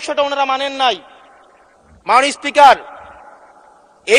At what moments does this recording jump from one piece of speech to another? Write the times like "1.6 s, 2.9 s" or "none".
none